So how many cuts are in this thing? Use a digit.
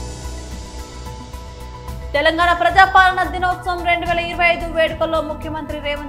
1